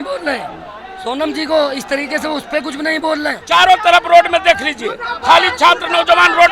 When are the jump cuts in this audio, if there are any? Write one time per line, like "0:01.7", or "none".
0:03.3